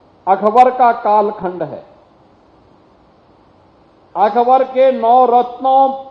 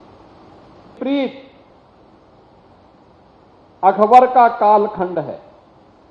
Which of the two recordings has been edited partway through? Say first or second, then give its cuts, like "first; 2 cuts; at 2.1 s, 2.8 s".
second; 1 cut; at 1.0 s